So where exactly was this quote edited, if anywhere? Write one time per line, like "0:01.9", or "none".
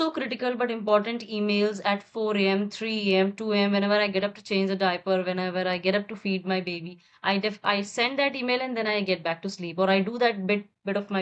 none